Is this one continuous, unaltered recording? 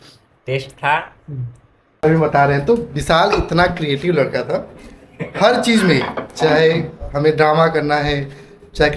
no; 1 cut; at 2.0 s

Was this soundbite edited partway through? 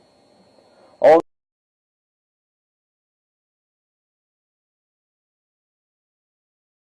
no; 0 cuts

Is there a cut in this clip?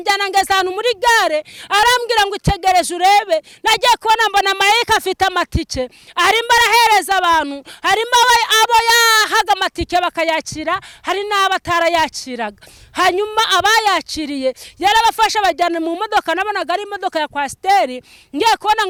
no; 0 cuts

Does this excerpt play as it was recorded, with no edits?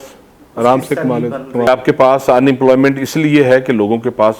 no; 1 cut; at 1.7 s

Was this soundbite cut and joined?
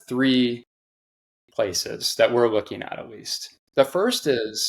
no; 0 cuts

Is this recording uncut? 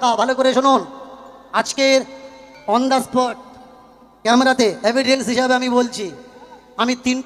yes; 0 cuts

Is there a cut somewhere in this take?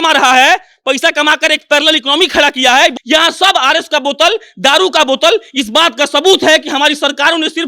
yes; 1 cut; at 3.0 s

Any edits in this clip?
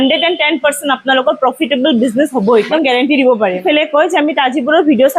yes; 2 cuts; at 2.7 s, 3.6 s

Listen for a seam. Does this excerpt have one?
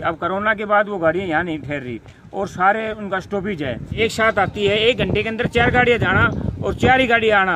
yes; 1 cut; at 3.9 s

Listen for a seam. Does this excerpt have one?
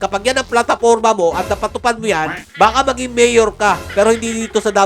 yes; 1 cut; at 2.4 s

